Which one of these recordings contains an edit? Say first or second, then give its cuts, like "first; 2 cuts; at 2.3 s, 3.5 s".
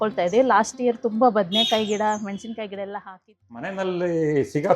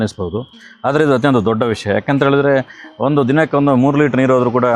first; 1 cut; at 3.5 s